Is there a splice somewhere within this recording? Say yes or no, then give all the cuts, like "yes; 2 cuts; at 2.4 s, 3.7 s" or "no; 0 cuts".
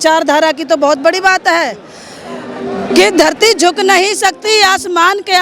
no; 0 cuts